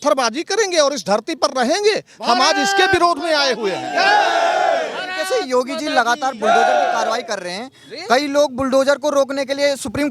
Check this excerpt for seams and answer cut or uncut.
uncut